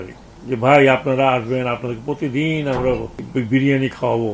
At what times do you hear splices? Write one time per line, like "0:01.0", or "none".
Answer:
0:03.2